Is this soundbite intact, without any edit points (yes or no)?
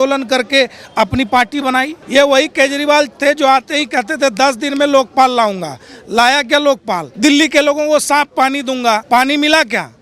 no